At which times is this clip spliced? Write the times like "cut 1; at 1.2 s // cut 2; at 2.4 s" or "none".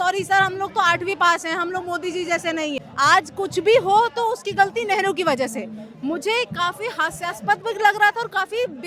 cut 1; at 2.8 s